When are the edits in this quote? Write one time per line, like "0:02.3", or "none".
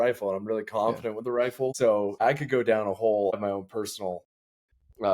0:02.2
0:03.3